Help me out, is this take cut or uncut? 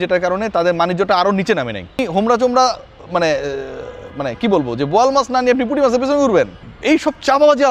cut